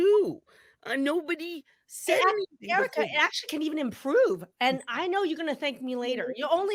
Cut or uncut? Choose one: uncut